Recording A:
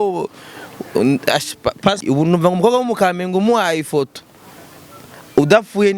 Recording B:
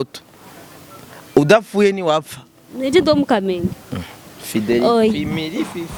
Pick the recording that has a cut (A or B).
A